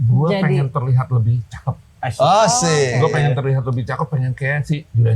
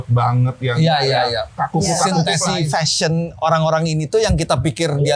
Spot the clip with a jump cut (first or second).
second